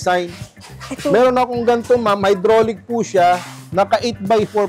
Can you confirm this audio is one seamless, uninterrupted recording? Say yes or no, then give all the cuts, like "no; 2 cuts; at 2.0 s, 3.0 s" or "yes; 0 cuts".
yes; 0 cuts